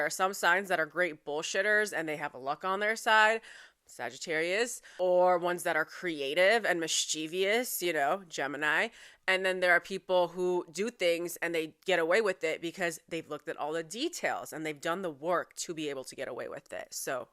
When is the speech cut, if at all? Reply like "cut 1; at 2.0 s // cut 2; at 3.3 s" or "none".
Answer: cut 1; at 4.9 s